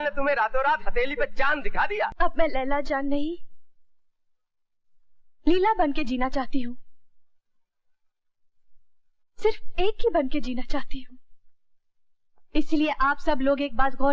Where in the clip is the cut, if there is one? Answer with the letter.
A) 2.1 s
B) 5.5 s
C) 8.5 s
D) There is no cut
A